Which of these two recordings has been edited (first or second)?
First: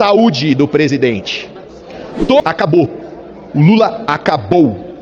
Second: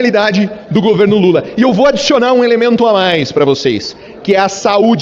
first